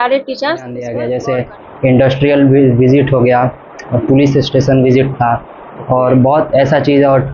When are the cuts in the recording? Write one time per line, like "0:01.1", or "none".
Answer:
0:01.0